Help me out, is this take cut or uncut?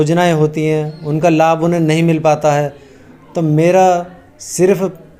uncut